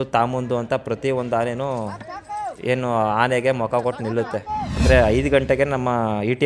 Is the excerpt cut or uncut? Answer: cut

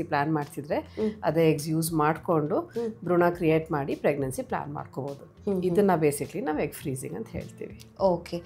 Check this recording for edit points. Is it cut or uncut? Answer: uncut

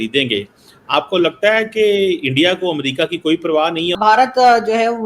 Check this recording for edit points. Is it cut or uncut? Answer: cut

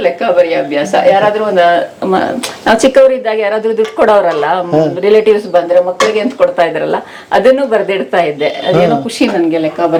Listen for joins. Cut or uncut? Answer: uncut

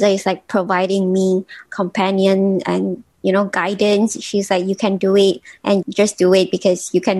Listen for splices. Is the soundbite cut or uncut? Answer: cut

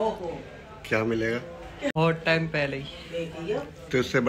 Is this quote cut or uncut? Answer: cut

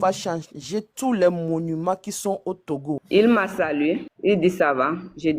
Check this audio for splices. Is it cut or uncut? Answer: cut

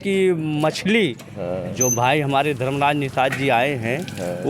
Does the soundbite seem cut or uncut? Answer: uncut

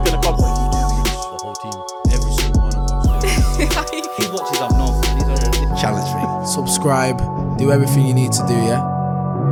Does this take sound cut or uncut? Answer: uncut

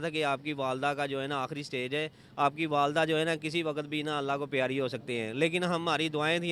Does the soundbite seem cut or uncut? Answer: uncut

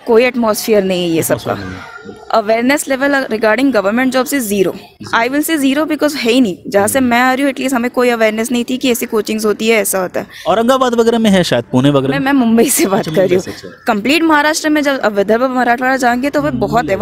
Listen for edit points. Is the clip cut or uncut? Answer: uncut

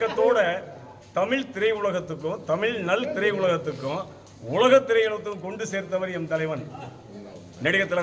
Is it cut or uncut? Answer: uncut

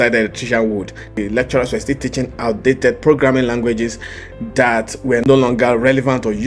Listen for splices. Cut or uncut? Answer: cut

